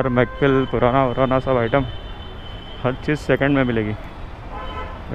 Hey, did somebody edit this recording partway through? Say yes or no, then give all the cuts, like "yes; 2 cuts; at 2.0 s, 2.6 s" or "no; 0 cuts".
no; 0 cuts